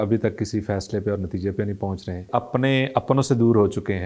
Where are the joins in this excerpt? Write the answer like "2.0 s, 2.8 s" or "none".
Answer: 2.1 s